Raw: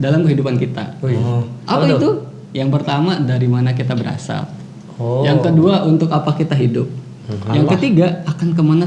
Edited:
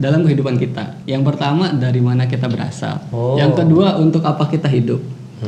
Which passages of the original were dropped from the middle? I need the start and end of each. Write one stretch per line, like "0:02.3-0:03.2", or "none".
0:00.9-0:02.4
0:04.5-0:04.9